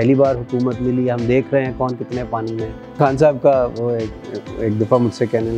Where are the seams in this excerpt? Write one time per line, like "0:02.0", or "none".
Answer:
0:03.0